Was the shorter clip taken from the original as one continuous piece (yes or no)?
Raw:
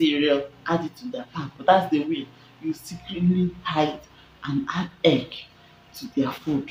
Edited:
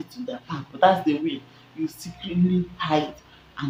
yes